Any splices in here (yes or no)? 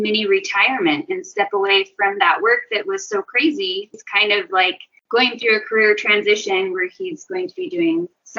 yes